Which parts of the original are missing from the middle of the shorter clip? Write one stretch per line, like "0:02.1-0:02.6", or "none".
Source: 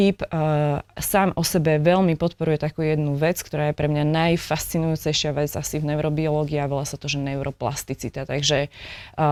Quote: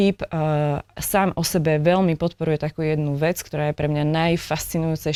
none